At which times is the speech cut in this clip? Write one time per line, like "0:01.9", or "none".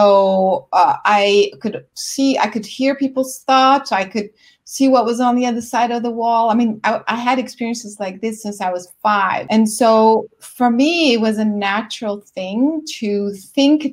0:09.4